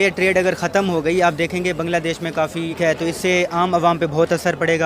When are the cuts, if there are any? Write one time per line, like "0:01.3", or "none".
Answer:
0:02.7